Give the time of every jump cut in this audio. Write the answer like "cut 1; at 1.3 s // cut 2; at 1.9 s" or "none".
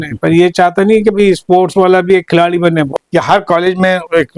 cut 1; at 2.9 s